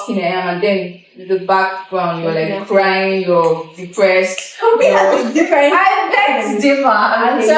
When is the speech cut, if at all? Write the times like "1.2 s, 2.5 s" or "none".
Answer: none

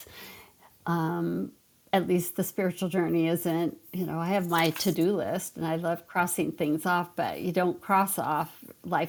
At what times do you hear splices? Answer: none

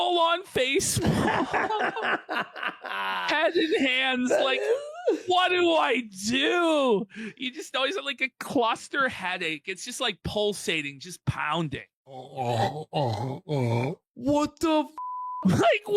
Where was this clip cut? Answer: 12.3 s, 14.0 s

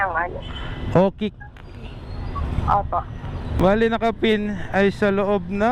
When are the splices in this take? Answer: 3.5 s

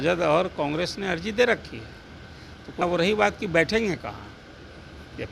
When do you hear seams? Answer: 2.8 s

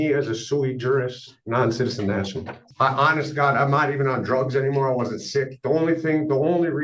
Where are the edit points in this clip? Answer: 2.6 s

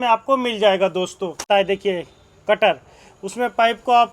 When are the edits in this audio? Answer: 1.5 s

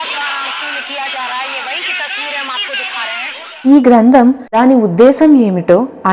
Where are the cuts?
3.4 s, 4.5 s

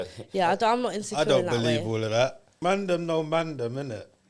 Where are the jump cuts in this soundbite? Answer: 2.6 s

